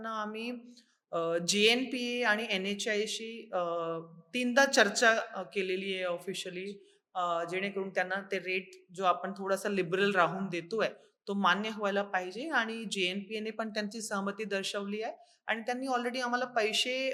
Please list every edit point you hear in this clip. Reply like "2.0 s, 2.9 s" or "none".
none

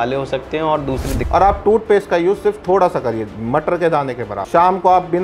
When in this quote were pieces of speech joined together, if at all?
1.1 s, 4.4 s

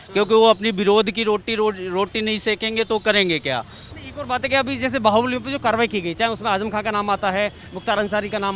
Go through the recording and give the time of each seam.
3.8 s

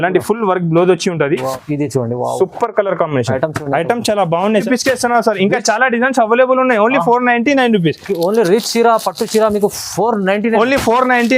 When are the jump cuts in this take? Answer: 1.6 s, 4.5 s

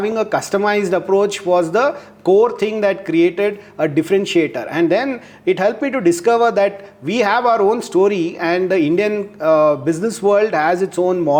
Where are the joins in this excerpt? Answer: none

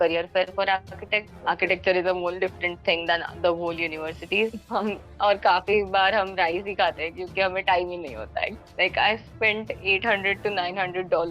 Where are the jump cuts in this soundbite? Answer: 1.3 s, 4.5 s, 8.6 s

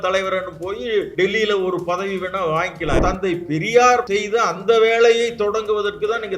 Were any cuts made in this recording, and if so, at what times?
1.1 s, 3.0 s, 4.1 s

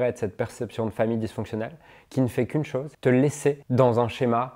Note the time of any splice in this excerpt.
2.9 s, 3.6 s

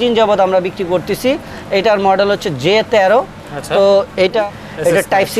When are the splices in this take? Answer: 4.4 s

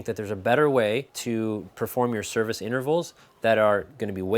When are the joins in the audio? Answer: 1.1 s

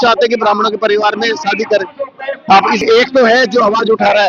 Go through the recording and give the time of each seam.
2.8 s

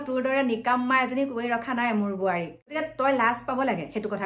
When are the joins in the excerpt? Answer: 2.8 s

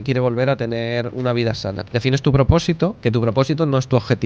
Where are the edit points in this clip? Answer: 1.8 s, 3.0 s

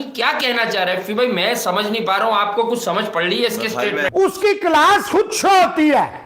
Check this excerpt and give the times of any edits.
4.1 s

